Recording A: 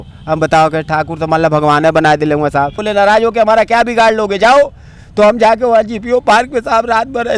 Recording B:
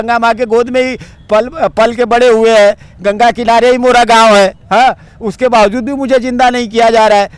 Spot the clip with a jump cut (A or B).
A